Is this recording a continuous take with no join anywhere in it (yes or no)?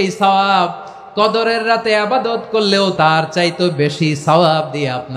no